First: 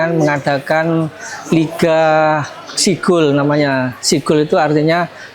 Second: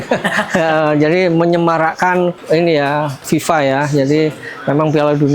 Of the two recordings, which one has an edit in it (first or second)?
second